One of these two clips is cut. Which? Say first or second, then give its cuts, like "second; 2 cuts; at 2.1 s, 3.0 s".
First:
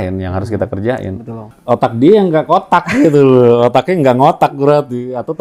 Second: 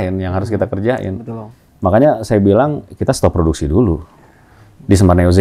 first; 1 cut; at 1.5 s